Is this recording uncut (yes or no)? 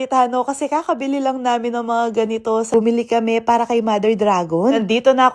no